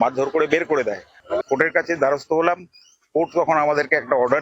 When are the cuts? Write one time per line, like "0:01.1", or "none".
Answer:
0:01.1